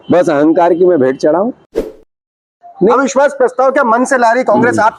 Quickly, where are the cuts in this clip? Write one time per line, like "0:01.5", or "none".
0:02.1